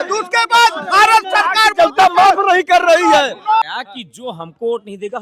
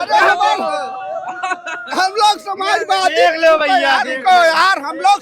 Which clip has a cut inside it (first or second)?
first